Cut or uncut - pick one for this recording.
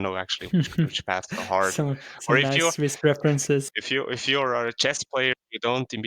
cut